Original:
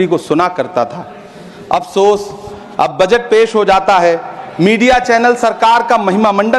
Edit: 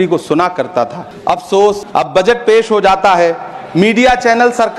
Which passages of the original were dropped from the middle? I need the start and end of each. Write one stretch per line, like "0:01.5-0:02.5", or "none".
0:01.1-0:01.5
0:02.3-0:02.7